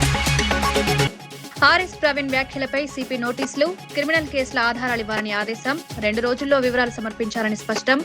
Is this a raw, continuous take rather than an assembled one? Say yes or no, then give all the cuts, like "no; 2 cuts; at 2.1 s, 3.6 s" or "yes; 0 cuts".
no; 1 cut; at 1.1 s